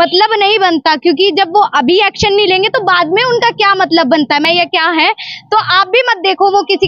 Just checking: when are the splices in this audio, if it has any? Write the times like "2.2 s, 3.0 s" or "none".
4.4 s